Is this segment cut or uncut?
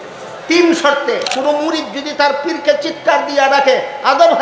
cut